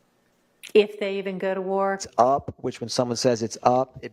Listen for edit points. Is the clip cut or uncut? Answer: cut